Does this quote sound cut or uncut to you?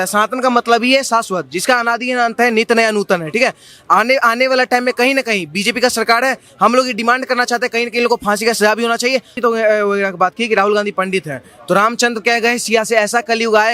cut